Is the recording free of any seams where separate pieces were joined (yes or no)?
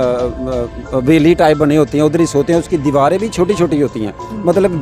yes